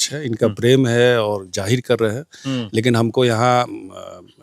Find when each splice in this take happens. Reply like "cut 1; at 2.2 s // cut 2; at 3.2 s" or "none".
none

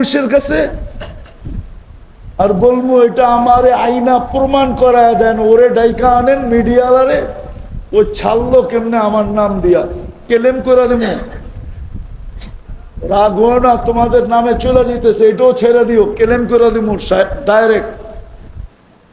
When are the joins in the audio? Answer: none

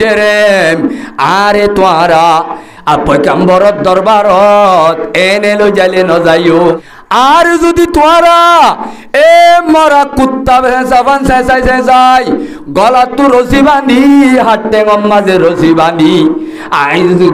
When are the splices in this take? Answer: cut 1; at 6.9 s

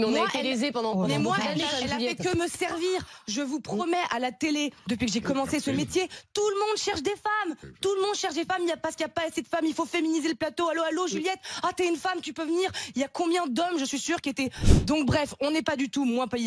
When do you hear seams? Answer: cut 1; at 14.7 s

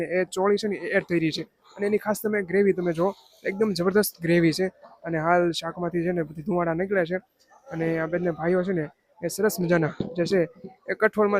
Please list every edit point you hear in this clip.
none

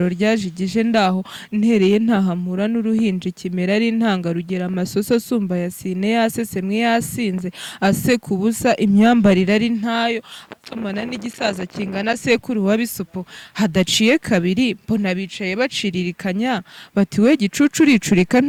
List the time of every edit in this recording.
none

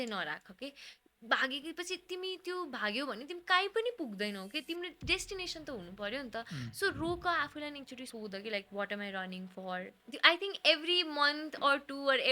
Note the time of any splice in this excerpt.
cut 1; at 8.1 s // cut 2; at 10.0 s

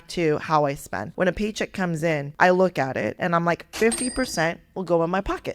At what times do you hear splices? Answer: cut 1; at 1.0 s // cut 2; at 2.3 s // cut 3; at 3.2 s

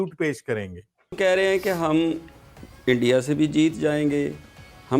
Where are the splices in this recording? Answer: cut 1; at 1.2 s

